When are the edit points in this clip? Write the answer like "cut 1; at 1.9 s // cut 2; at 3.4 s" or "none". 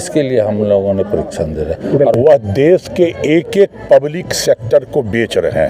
cut 1; at 2.1 s